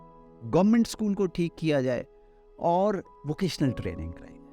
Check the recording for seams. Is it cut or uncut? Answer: cut